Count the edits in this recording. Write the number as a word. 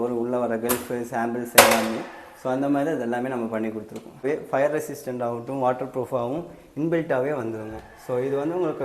one